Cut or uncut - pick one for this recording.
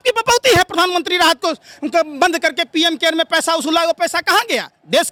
uncut